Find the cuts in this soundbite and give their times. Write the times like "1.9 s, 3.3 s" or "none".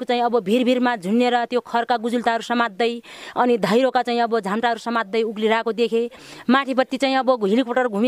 none